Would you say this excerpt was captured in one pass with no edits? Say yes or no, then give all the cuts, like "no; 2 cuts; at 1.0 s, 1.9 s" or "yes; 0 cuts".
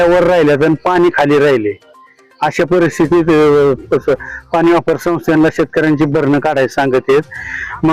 yes; 0 cuts